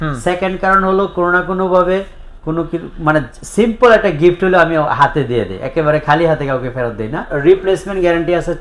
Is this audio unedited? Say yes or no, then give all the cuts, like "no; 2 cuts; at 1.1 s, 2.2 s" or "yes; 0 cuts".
no; 1 cut; at 7.3 s